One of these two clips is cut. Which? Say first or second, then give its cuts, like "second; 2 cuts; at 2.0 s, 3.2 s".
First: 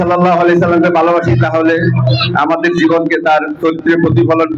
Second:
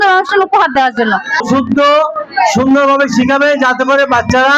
second; 1 cut; at 1.4 s